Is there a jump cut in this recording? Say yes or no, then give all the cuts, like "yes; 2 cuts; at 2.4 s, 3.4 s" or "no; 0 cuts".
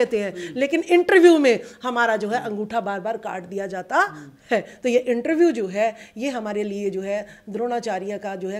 no; 0 cuts